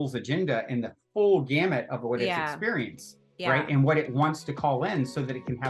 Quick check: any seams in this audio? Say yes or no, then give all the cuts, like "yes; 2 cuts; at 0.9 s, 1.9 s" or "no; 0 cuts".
no; 0 cuts